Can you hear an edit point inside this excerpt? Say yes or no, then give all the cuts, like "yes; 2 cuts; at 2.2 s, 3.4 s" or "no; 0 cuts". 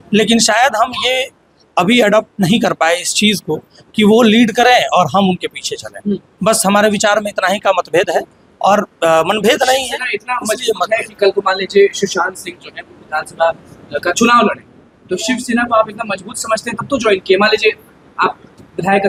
no; 0 cuts